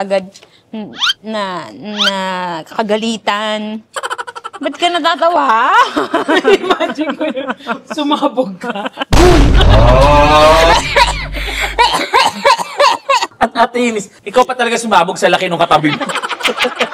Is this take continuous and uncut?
yes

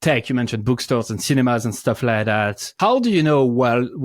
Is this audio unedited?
no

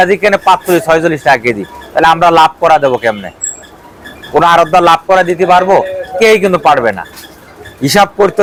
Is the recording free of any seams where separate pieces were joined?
yes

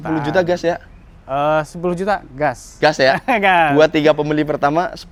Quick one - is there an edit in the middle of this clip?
no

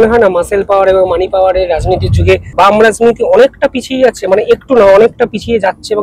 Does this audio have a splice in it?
yes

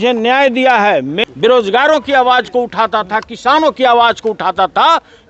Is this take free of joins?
no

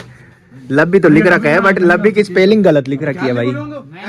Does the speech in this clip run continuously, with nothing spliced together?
yes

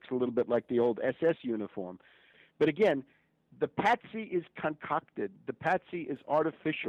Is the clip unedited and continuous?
no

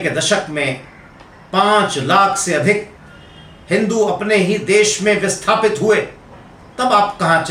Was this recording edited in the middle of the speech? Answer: no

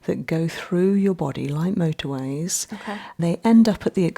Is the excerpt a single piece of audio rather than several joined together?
no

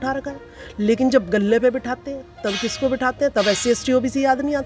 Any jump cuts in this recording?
no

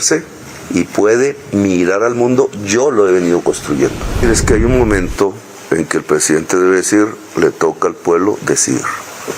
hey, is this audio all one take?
no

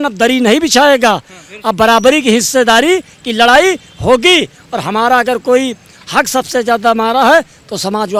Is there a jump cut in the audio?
no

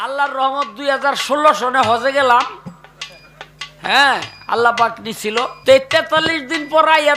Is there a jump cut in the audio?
yes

